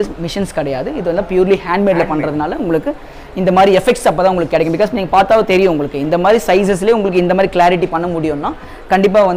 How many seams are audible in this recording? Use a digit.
0